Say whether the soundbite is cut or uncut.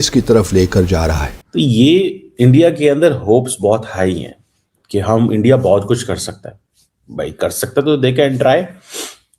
cut